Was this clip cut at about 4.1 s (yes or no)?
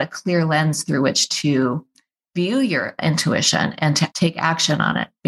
yes